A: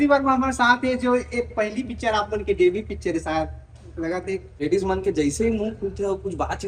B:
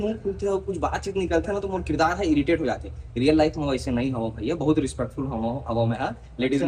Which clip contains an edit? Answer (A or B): A